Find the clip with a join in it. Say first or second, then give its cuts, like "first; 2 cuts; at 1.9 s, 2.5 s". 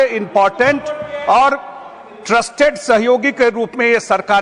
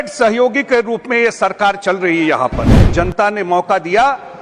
second; 1 cut; at 2.8 s